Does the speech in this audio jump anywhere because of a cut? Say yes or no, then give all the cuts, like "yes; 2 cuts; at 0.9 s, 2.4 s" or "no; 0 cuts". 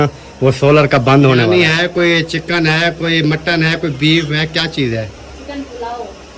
yes; 1 cut; at 1.5 s